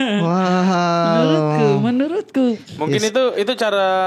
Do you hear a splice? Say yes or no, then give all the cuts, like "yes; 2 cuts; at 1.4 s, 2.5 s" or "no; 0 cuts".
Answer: no; 0 cuts